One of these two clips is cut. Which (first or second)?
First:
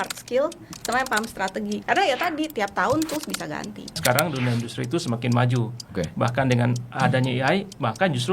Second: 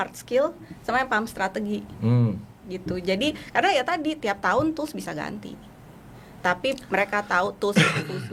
first